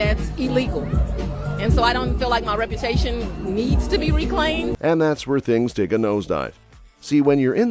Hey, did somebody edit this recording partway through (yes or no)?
no